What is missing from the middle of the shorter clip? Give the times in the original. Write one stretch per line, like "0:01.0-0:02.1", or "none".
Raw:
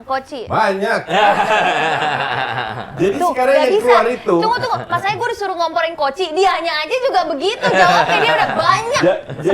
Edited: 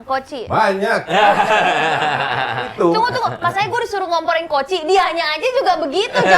0:02.7-0:04.2